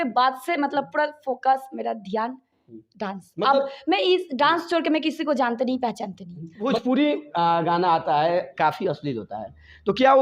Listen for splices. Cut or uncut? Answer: cut